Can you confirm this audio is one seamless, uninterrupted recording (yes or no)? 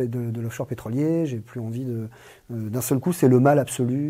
yes